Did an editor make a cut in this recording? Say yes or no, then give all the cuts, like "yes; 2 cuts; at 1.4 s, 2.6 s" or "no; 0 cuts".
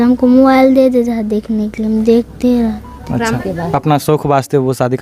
yes; 1 cut; at 3.4 s